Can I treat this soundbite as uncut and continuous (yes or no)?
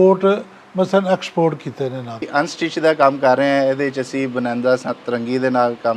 no